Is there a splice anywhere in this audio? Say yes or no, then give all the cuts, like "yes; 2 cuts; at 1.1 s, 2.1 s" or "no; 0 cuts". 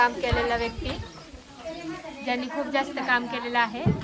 no; 0 cuts